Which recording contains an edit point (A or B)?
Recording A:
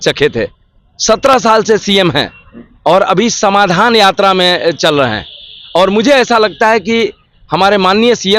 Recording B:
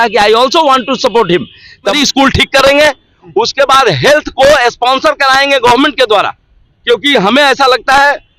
B